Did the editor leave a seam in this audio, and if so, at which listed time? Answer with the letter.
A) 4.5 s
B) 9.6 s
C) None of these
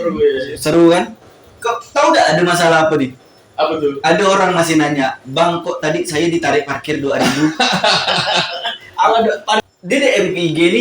B